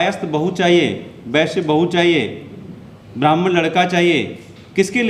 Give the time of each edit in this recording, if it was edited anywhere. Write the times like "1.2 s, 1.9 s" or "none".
none